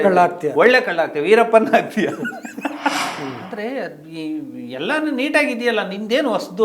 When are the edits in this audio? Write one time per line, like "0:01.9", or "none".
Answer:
0:03.1

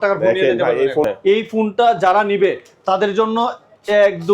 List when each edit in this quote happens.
0:01.1

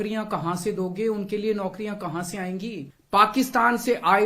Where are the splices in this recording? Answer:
0:02.9

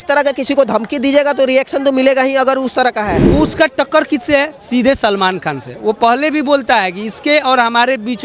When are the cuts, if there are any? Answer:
0:03.2

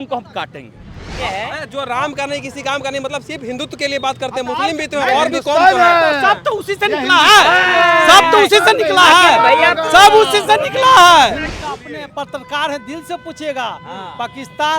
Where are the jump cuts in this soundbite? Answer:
0:01.2
0:11.5

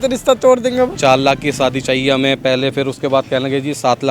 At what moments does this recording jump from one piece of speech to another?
0:00.9

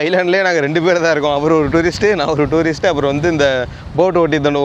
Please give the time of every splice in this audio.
none

